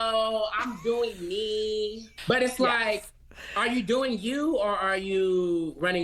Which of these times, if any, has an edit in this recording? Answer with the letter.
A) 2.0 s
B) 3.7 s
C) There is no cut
A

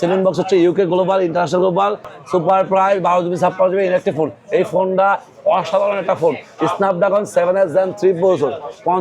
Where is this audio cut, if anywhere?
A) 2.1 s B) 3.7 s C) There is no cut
A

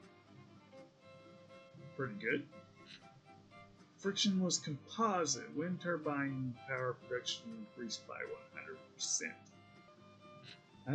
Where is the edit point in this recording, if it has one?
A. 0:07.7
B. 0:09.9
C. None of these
B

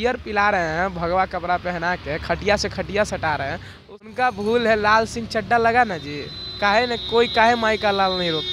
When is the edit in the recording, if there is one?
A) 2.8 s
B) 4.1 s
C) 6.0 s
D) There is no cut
B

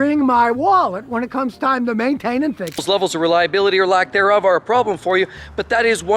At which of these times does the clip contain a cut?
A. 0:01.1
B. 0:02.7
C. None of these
B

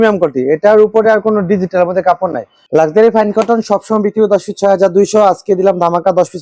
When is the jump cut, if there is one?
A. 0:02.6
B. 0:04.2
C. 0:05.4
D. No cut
A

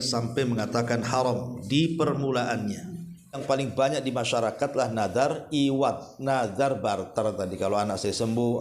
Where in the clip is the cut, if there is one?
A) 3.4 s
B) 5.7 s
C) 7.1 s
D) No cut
A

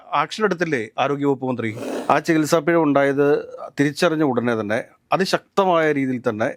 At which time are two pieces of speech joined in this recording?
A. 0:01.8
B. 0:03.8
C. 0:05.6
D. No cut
A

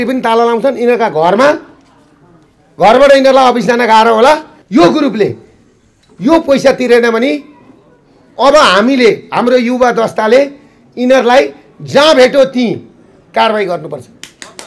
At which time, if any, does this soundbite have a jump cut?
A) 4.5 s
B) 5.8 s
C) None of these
A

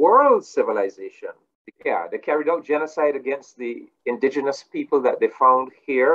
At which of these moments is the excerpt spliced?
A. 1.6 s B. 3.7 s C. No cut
A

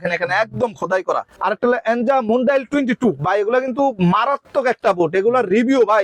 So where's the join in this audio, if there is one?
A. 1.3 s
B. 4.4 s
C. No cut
A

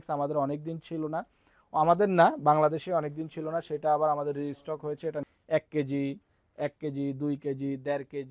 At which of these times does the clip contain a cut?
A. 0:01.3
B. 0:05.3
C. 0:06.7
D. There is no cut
B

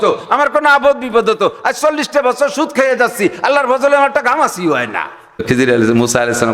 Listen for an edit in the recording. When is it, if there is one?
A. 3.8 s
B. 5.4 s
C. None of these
B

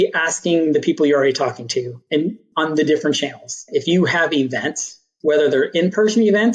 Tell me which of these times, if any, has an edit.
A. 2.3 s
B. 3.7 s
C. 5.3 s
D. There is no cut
B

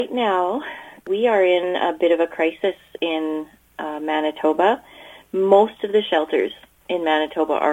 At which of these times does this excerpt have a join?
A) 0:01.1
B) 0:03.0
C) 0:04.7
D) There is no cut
A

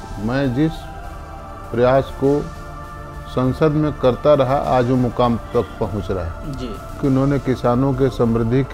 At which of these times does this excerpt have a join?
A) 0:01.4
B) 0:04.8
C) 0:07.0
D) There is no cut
C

